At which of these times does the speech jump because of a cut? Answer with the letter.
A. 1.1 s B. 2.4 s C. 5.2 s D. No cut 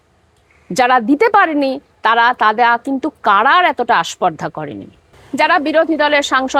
C